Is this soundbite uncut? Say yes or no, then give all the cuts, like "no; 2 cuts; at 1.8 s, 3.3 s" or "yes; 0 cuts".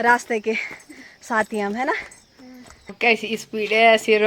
no; 1 cut; at 2.9 s